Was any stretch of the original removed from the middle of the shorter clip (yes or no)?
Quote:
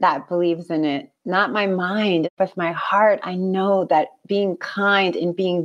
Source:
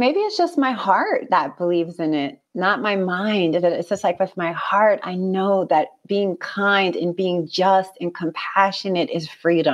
yes